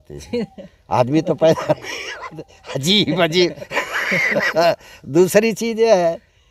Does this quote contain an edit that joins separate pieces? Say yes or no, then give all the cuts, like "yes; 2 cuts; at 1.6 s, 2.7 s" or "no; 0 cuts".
no; 0 cuts